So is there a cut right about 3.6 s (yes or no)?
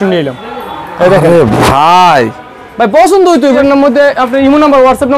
yes